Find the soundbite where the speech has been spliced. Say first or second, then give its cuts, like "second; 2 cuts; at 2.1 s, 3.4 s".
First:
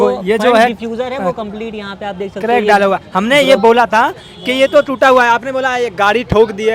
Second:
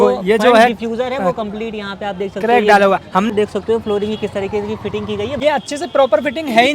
second; 2 cuts; at 3.3 s, 5.3 s